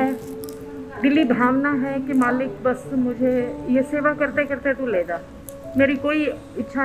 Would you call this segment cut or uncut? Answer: uncut